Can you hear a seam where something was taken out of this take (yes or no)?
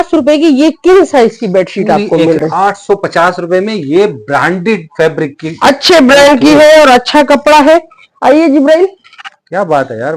no